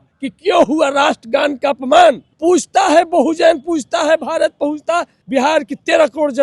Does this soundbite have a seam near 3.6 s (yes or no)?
no